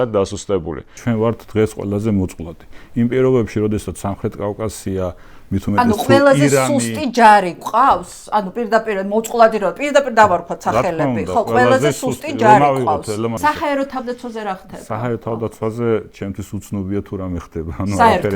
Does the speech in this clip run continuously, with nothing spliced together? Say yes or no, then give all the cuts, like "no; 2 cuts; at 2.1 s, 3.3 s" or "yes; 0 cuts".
no; 2 cuts; at 0.9 s, 13.4 s